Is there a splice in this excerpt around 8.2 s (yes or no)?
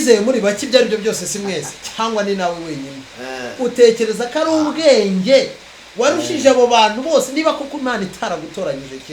no